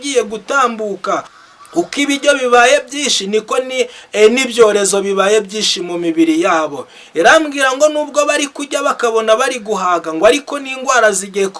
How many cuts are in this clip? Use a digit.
1